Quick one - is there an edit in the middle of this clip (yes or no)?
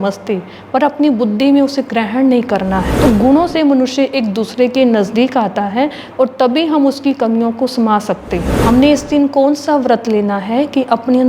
yes